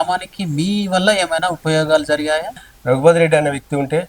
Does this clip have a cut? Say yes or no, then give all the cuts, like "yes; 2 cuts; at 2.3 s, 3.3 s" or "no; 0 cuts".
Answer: yes; 1 cut; at 2.6 s